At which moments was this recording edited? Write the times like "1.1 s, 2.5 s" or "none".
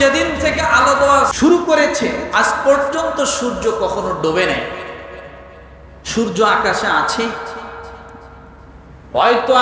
1.3 s